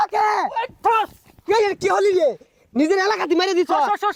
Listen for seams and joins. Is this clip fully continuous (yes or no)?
yes